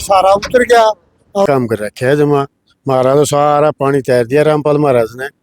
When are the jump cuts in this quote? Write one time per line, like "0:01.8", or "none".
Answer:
0:01.5